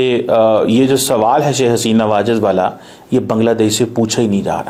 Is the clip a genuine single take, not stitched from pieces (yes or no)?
yes